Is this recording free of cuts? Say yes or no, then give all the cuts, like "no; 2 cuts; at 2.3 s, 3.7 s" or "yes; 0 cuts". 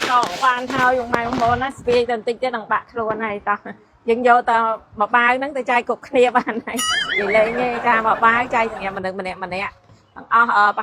yes; 0 cuts